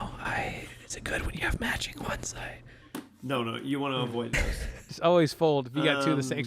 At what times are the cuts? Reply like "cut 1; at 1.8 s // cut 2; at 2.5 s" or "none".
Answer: cut 1; at 4.8 s

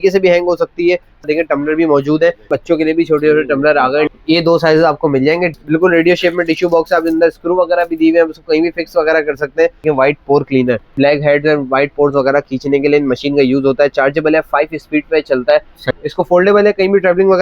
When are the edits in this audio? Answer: cut 1; at 1.2 s // cut 2; at 2.5 s // cut 3; at 4.1 s // cut 4; at 5.5 s // cut 5; at 9.8 s // cut 6; at 10.9 s // cut 7; at 15.8 s

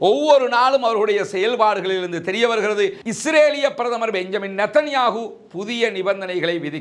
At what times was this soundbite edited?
cut 1; at 3.0 s

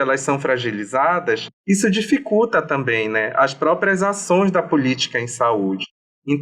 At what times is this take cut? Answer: cut 1; at 1.5 s

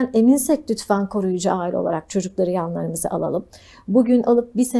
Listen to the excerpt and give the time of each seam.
none

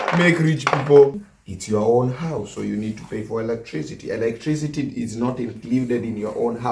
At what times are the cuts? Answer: cut 1; at 1.2 s

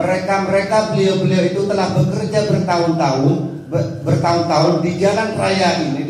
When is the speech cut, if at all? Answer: none

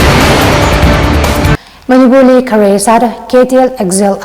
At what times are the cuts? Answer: cut 1; at 1.6 s

